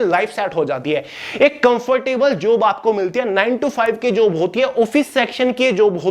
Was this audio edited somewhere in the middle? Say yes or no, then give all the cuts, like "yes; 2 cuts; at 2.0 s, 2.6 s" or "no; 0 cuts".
no; 0 cuts